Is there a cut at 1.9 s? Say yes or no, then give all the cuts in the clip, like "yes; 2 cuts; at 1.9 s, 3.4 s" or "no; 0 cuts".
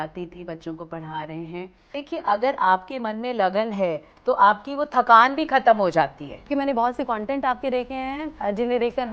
yes; 2 cuts; at 1.9 s, 6.5 s